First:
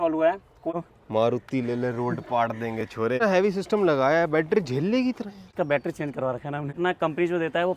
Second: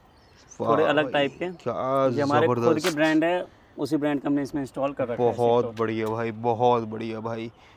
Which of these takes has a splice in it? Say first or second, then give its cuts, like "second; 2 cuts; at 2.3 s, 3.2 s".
first; 4 cuts; at 0.7 s, 3.2 s, 5.5 s, 6.8 s